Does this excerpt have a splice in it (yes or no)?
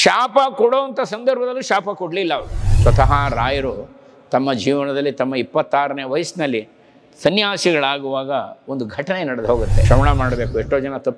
yes